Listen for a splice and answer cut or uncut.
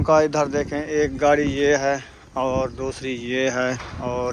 uncut